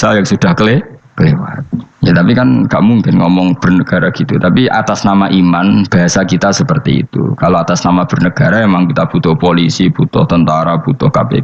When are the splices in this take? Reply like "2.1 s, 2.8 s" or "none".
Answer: none